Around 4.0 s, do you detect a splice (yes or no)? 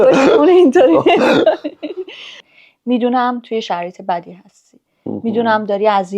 no